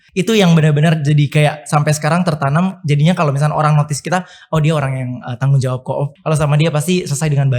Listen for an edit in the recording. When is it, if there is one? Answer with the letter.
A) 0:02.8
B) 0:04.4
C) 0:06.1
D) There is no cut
C